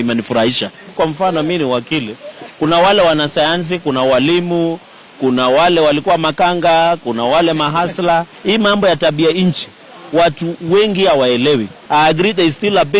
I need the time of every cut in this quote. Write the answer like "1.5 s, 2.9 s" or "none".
0.9 s, 8.3 s, 11.8 s